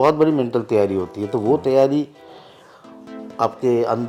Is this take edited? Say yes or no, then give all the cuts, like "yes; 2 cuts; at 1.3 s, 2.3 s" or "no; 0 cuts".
no; 0 cuts